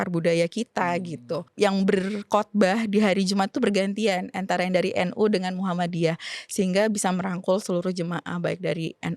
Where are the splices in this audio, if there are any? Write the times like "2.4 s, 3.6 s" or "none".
1.5 s

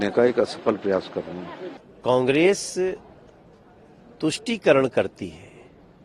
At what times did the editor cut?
1.4 s

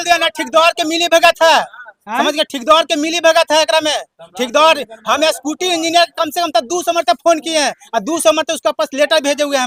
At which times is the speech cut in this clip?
none

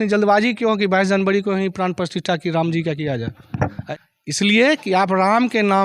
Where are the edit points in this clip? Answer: 3.8 s

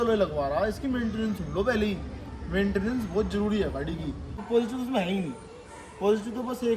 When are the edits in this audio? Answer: 4.4 s

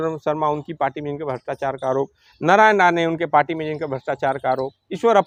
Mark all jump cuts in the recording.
none

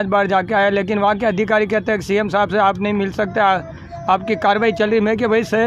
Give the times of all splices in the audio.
none

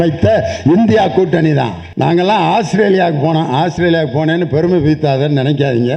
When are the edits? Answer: 1.8 s

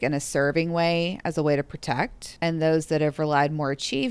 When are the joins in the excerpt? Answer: 2.2 s

